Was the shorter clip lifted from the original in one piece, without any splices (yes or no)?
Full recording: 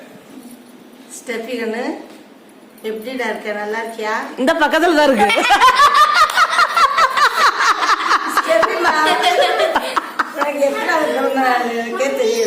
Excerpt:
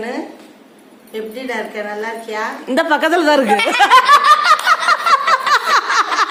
yes